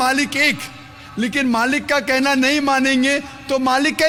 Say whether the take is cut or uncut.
uncut